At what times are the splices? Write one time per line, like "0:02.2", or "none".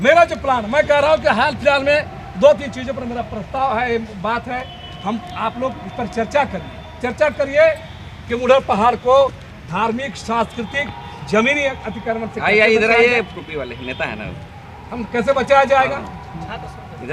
none

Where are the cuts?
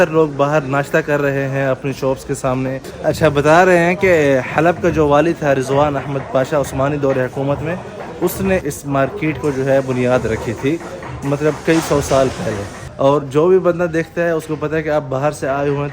0:02.9
0:08.6
0:12.8

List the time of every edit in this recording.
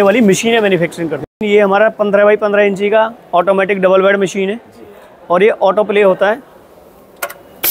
0:01.3

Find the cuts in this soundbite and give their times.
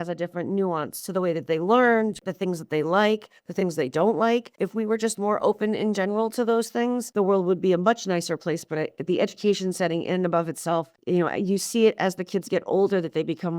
0:02.2
0:04.5
0:07.1
0:10.9

